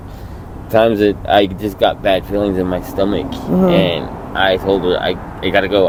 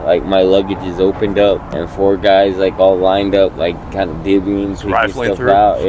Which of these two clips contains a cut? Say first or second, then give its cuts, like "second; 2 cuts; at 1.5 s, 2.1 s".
second; 1 cut; at 1.7 s